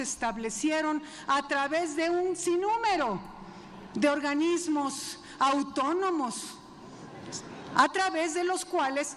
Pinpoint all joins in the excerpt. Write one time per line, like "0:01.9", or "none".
none